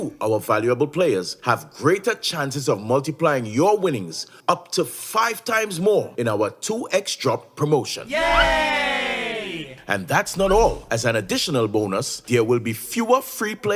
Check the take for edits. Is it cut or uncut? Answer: uncut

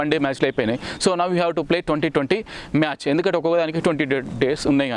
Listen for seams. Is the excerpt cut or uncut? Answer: uncut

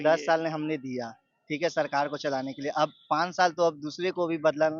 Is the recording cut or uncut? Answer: uncut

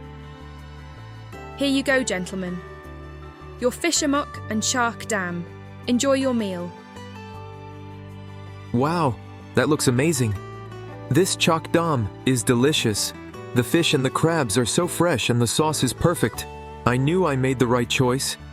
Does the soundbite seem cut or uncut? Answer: cut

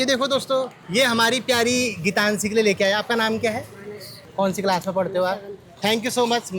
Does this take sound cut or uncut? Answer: uncut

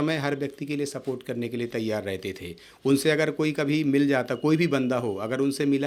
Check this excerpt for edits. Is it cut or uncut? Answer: uncut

